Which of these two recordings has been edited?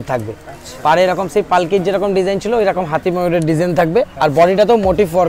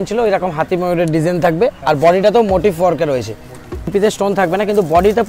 second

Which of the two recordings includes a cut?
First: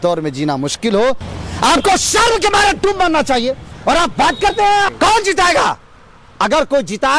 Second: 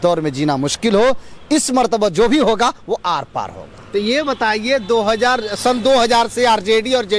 first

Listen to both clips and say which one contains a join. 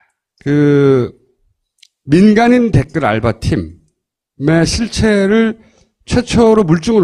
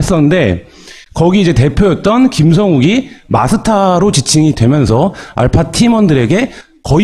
second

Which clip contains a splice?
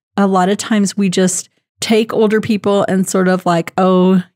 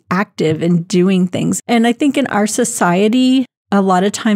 second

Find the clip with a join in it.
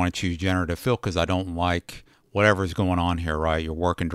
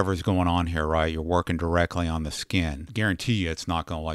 second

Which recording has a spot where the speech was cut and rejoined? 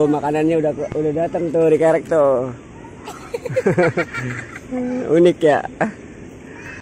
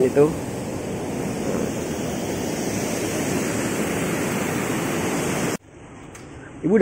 second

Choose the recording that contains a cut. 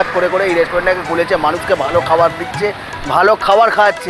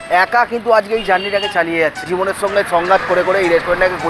second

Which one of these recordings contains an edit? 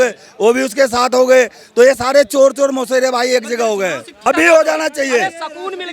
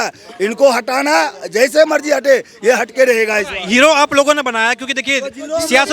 first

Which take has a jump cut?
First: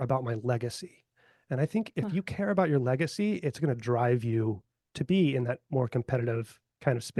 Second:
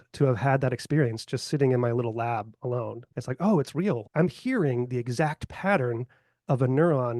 second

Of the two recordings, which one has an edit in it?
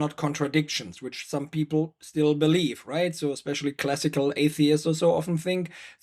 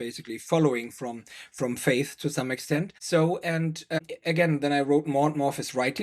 second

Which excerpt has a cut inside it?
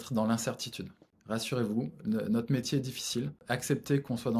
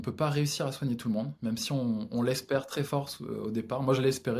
first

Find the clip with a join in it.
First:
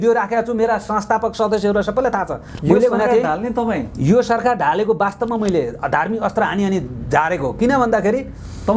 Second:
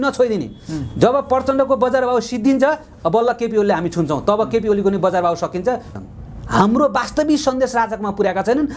second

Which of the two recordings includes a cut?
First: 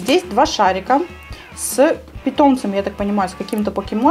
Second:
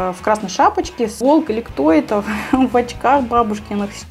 second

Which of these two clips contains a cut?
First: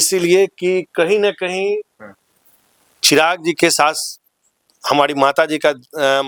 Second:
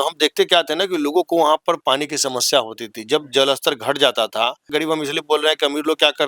second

